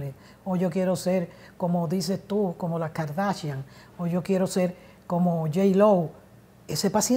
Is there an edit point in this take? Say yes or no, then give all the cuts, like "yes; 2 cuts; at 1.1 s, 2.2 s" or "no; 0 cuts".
no; 0 cuts